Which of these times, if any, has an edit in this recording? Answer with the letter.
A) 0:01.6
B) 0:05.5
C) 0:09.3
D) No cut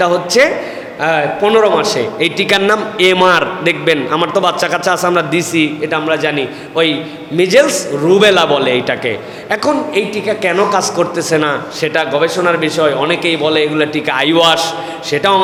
D